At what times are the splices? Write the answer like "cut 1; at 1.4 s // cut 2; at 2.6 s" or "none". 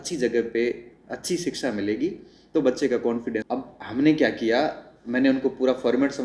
cut 1; at 3.4 s